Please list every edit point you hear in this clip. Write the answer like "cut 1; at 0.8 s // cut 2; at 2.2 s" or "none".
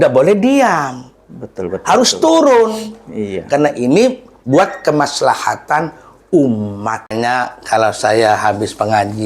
cut 1; at 7.1 s